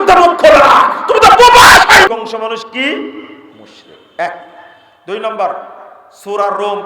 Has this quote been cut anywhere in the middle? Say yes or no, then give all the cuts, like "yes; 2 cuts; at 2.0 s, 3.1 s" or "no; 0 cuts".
yes; 1 cut; at 2.1 s